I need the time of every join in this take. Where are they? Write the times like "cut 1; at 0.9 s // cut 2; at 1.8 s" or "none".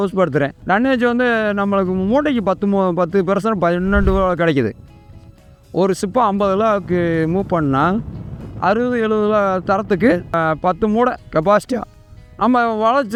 none